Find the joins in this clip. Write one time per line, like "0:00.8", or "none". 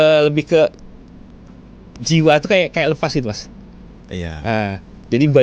none